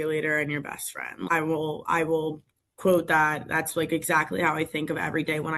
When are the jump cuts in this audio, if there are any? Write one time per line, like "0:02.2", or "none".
0:01.3